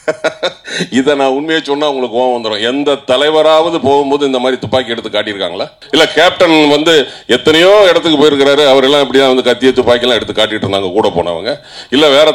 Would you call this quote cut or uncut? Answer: cut